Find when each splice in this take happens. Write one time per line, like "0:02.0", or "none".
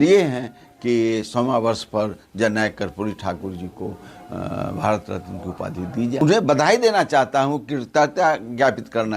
0:06.2